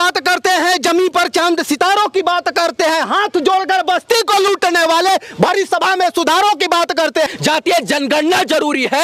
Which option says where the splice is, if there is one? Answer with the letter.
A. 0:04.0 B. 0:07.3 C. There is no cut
B